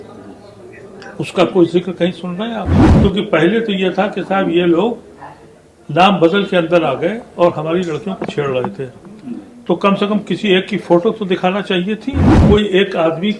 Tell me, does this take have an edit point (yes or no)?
yes